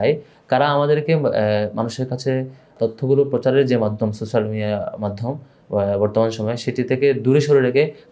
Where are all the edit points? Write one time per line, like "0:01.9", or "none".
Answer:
0:02.7

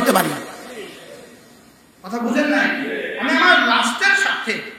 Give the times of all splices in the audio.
none

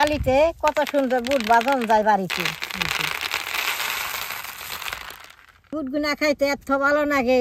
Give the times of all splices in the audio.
none

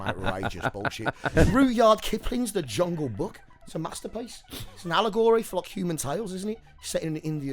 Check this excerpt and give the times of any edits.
0:01.2

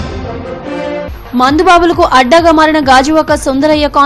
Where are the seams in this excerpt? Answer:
0:01.1

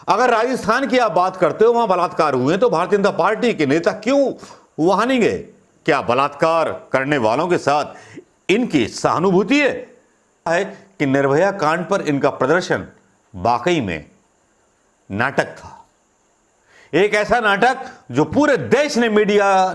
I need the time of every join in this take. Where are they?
0:10.5

